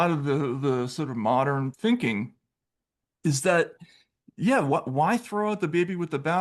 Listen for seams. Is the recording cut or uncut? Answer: cut